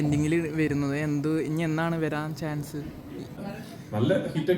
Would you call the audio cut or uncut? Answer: cut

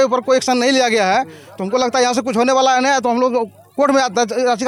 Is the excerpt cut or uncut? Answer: uncut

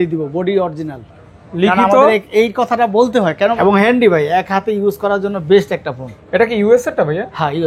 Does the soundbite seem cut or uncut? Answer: cut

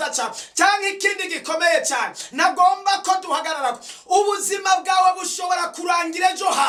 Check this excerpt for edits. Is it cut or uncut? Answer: uncut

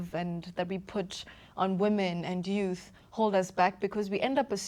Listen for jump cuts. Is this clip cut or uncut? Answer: uncut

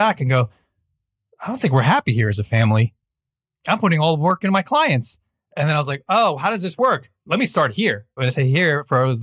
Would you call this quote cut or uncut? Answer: cut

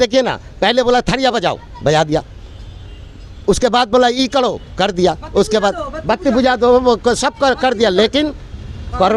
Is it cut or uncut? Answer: uncut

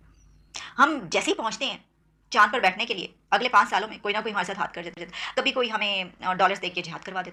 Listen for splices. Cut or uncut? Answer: uncut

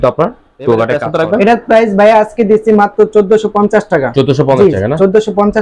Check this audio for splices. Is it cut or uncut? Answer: cut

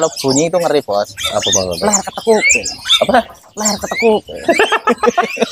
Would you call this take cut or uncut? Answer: uncut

